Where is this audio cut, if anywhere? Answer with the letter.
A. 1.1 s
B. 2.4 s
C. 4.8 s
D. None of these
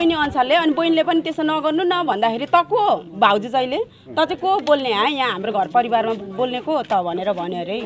D